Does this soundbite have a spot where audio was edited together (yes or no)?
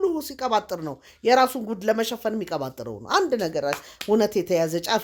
no